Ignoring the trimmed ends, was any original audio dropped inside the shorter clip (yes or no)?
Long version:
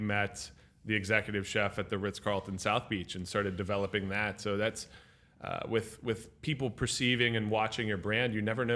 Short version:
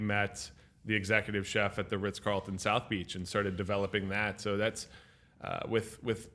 no